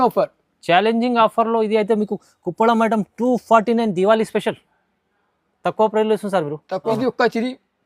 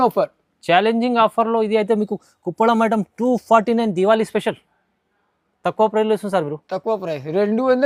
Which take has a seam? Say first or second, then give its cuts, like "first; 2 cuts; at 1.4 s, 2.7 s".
first; 1 cut; at 6.9 s